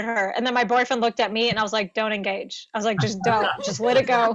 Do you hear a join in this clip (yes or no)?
no